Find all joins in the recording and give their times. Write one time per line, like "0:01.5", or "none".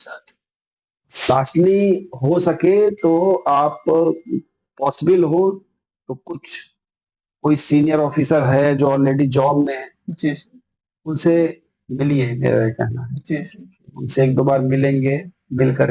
0:01.2

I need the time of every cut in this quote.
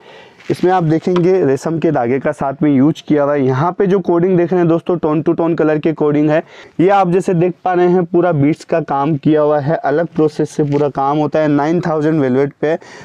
0:06.6

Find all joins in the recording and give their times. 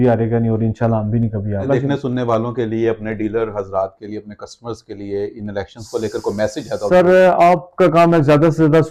none

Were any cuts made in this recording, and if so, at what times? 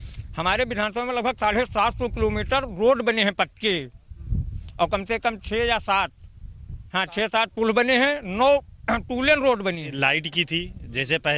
0:09.9

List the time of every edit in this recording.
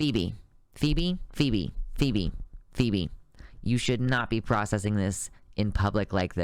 none

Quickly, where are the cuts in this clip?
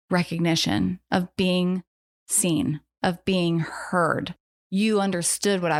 none

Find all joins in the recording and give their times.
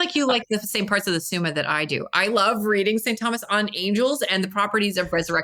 none

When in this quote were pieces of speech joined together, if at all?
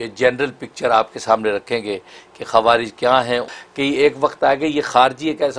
0:03.6

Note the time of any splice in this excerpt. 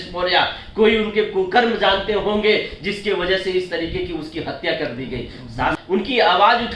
0:05.8

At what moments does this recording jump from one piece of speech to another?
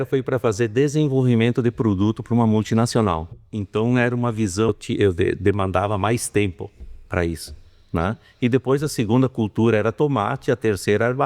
0:04.7

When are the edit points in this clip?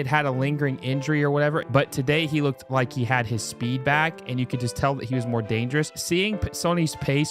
0:01.7
0:06.0

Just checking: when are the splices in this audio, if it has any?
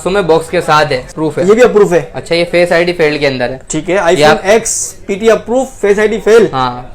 0:01.1

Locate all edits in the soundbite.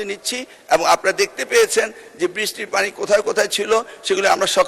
none

